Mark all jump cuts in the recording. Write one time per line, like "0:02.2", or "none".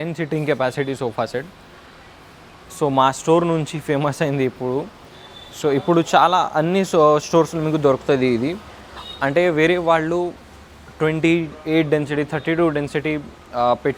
none